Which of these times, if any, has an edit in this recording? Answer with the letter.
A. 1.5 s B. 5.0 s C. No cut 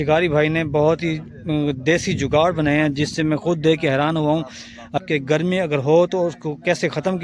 B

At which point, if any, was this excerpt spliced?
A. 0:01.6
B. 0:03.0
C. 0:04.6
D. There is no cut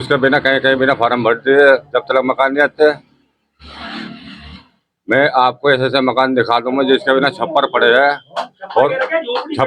D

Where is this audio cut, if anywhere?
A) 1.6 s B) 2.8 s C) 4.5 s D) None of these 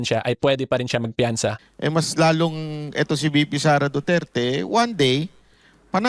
A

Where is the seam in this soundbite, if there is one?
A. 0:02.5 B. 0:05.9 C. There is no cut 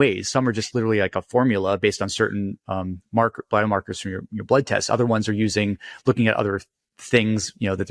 C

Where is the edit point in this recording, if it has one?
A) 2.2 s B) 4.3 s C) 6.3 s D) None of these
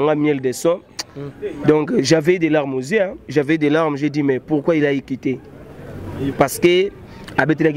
C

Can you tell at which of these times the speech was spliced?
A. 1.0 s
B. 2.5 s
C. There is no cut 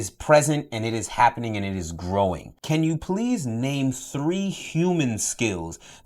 B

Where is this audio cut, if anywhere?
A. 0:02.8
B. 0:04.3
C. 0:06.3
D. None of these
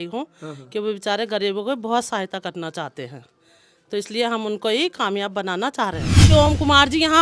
C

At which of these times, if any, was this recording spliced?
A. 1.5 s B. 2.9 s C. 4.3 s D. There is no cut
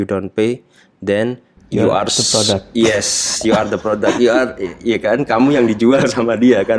A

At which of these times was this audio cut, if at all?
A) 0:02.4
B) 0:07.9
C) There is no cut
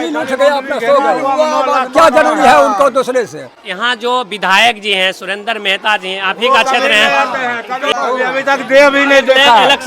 B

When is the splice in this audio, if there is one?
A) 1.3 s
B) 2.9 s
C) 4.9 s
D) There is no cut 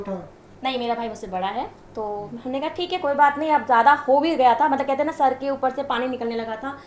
D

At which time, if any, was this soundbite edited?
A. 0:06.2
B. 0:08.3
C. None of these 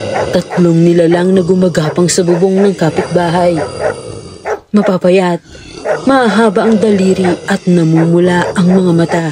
C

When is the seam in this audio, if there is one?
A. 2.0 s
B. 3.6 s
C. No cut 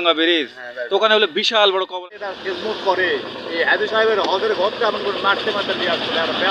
A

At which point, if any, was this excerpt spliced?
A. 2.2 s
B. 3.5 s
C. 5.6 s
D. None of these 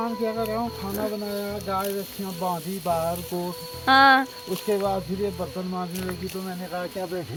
D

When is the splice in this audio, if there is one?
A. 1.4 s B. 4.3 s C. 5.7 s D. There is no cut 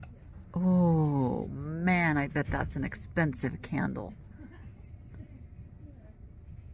D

